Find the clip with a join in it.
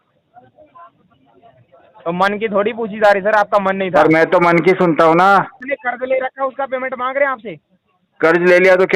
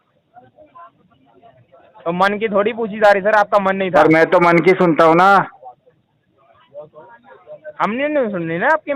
first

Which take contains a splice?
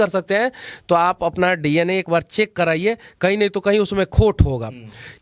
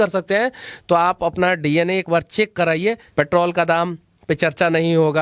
second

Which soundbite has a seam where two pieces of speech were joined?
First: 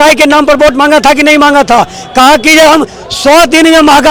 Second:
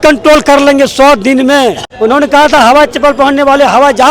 second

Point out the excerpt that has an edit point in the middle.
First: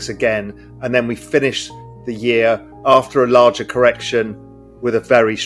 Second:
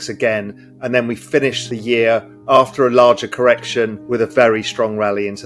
second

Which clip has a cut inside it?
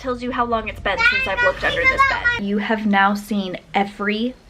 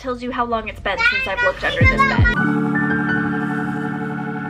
first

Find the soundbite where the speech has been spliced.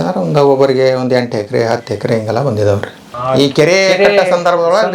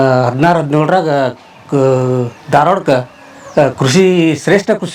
first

